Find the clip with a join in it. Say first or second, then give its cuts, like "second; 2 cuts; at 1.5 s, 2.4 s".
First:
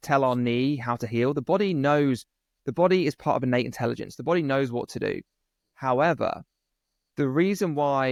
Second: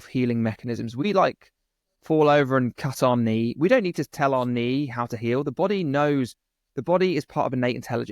second; 1 cut; at 1.0 s